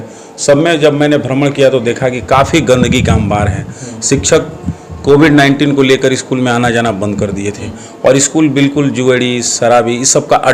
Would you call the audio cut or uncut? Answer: uncut